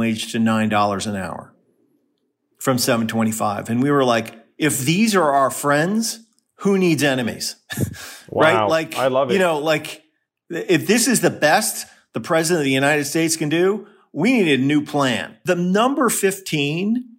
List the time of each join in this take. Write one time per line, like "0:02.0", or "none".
0:15.3